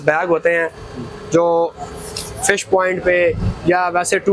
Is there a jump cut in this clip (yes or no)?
no